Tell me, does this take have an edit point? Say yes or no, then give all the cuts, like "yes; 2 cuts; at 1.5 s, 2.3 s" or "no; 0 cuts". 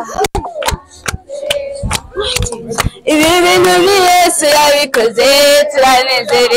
no; 0 cuts